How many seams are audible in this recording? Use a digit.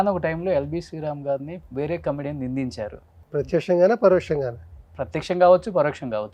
2